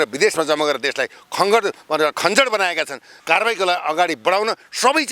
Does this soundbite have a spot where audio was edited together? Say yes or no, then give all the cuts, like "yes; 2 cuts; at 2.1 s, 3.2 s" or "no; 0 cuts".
yes; 1 cut; at 3.1 s